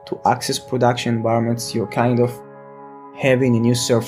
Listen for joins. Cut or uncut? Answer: cut